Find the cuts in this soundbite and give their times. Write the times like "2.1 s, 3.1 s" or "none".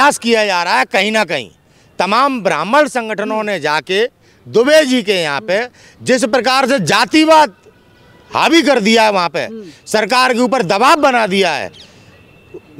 none

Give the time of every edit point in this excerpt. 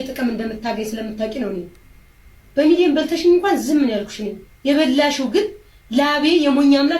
none

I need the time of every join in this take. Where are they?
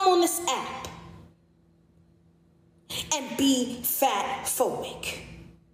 none

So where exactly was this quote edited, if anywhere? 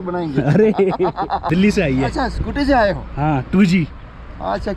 1.5 s

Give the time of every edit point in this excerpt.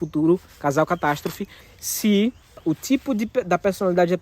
1.6 s, 2.7 s

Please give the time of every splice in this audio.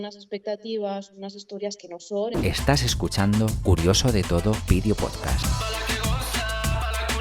2.4 s

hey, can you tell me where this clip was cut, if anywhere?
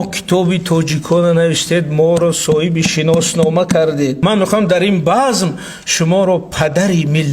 4.2 s

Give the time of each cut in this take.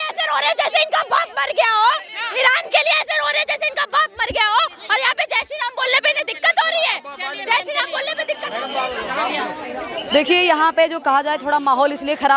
none

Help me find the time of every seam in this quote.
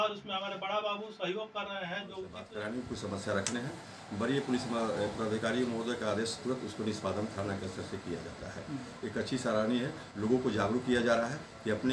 2.4 s

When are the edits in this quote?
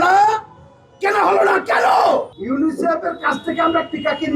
2.3 s

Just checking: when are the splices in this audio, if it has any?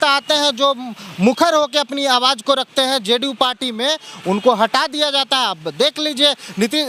none

